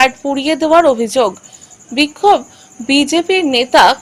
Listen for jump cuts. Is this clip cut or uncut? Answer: uncut